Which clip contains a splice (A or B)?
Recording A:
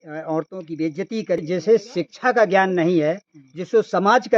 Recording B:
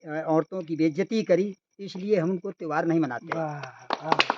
A